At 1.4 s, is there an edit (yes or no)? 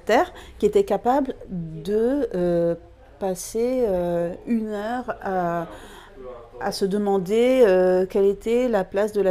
no